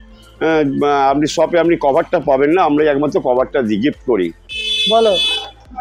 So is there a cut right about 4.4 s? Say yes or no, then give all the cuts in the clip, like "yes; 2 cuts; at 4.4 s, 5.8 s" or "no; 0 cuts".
yes; 1 cut; at 4.4 s